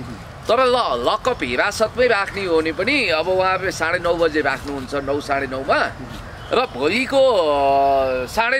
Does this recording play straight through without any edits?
yes; 0 cuts

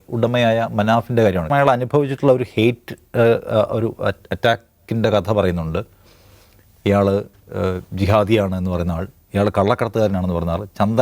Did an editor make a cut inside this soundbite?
yes; 1 cut; at 1.5 s

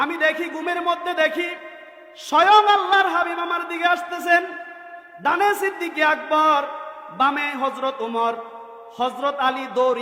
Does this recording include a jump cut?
no; 0 cuts

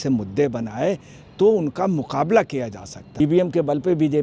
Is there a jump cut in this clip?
yes; 1 cut; at 3.0 s

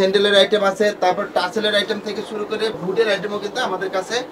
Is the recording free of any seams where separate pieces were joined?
no; 1 cut; at 2.8 s

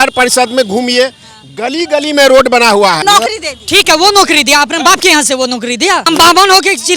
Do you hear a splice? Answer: yes; 2 cuts; at 3.0 s, 6.1 s

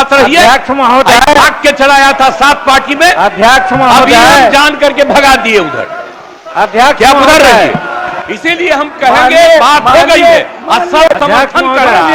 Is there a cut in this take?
no; 0 cuts

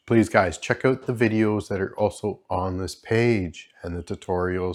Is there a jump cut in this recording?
no; 0 cuts

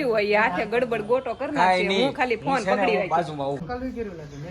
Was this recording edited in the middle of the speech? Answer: yes; 1 cut; at 3.6 s

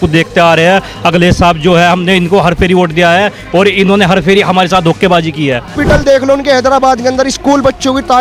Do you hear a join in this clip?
yes; 1 cut; at 5.8 s

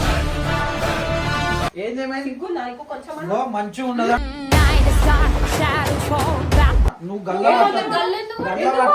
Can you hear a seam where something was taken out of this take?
yes; 2 cuts; at 1.7 s, 6.9 s

